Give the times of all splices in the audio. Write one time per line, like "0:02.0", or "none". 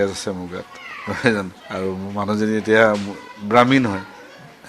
0:01.6